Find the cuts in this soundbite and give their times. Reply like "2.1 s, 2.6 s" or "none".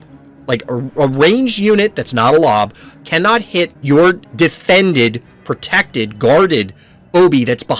3.8 s, 4.3 s